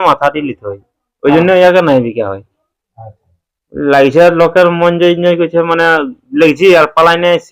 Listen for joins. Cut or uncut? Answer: uncut